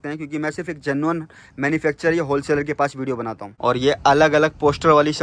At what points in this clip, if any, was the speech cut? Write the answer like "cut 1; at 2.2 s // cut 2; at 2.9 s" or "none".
cut 1; at 3.4 s